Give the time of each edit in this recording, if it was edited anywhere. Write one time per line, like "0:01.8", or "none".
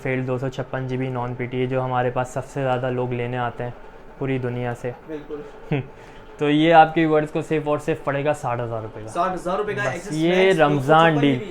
none